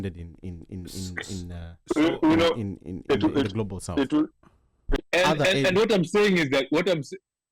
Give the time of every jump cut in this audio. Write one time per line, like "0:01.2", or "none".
0:05.0